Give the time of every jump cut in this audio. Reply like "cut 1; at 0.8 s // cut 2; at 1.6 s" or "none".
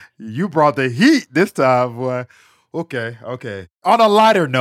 cut 1; at 3.7 s